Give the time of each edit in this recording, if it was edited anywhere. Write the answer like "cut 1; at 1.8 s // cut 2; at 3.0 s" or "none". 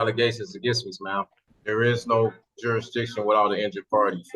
cut 1; at 1.5 s